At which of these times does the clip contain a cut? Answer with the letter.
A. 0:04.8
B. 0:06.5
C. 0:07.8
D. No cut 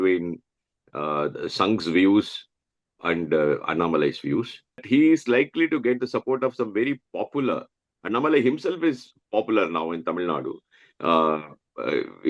A